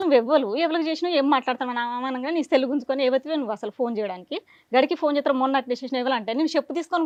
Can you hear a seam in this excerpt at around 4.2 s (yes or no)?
no